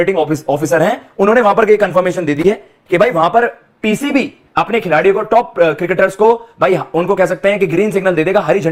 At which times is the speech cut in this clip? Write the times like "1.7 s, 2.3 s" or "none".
none